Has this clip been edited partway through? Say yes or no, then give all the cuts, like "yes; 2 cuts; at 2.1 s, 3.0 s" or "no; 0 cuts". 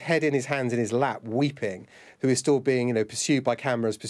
no; 0 cuts